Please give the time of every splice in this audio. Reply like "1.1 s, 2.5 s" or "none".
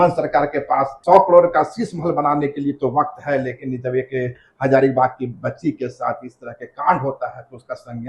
0.9 s